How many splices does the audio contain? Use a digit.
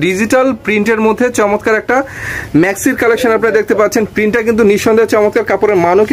0